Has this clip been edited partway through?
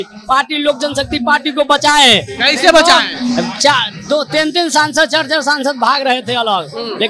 no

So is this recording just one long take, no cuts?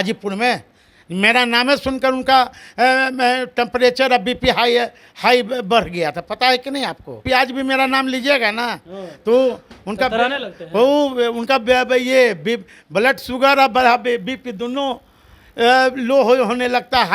no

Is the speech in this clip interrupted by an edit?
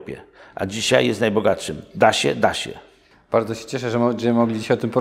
no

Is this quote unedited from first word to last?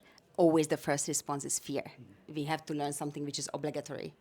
no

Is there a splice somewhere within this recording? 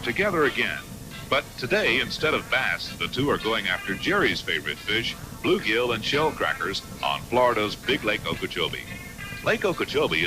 yes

